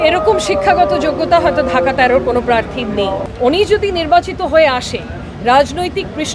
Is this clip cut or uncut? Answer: cut